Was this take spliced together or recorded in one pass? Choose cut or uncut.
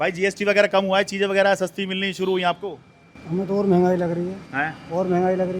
uncut